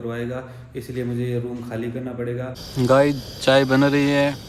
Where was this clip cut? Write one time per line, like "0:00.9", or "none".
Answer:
0:02.6